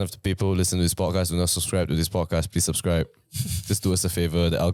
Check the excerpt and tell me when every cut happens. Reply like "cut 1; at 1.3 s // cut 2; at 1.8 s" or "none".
none